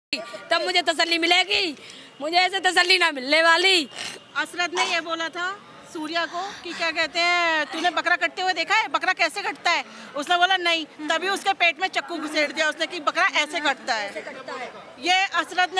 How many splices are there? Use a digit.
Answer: 0